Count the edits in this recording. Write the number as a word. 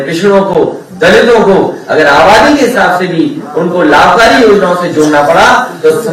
zero